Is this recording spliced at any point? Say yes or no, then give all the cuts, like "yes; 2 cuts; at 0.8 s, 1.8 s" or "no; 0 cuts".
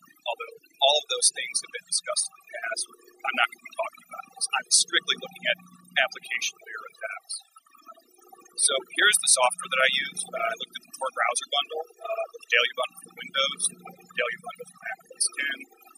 yes; 1 cut; at 11.9 s